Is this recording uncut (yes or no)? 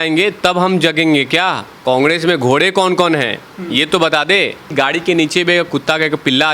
no